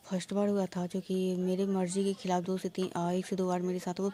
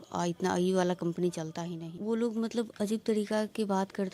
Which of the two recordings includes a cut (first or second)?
second